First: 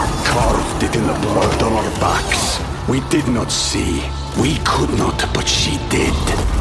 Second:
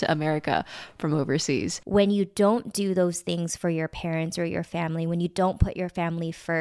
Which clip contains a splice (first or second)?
second